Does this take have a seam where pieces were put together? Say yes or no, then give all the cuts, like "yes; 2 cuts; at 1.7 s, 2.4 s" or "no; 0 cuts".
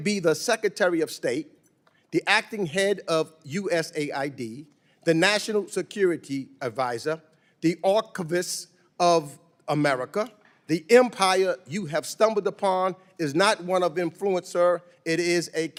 no; 0 cuts